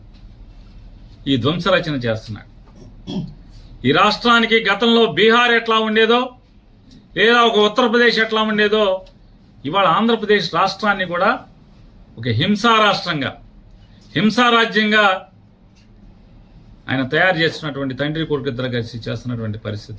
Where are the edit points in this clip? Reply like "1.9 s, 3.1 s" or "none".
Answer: none